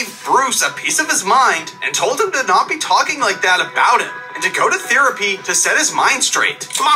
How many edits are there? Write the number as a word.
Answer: zero